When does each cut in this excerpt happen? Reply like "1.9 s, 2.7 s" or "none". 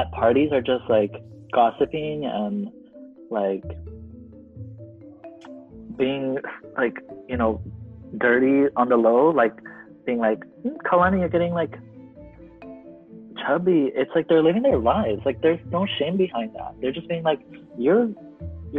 12.0 s, 13.4 s